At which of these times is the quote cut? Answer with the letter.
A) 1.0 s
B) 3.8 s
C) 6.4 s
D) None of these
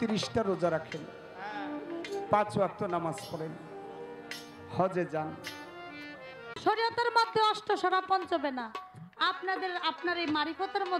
C